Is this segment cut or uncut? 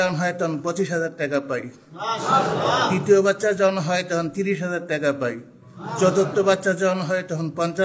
uncut